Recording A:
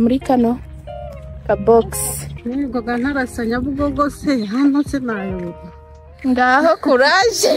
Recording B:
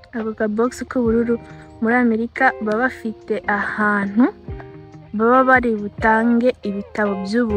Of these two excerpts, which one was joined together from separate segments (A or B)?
A